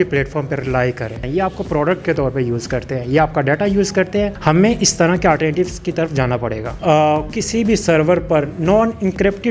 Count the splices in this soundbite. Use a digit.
3